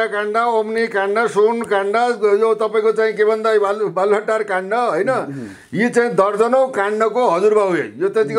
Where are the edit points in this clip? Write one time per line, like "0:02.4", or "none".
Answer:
none